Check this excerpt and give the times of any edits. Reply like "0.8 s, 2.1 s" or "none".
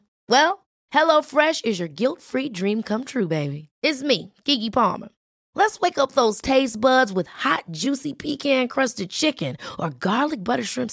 none